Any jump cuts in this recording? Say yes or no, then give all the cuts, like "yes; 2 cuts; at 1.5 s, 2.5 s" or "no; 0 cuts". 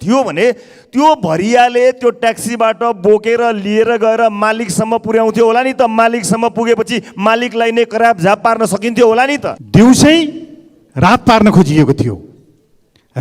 yes; 1 cut; at 9.5 s